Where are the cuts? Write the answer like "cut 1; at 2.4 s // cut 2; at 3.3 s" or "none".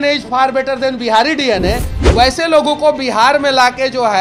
cut 1; at 1.9 s